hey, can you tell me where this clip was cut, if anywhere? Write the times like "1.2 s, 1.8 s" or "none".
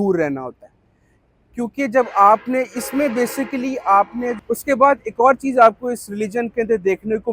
4.4 s